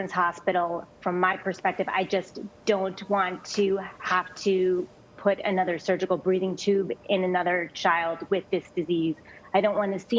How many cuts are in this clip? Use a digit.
0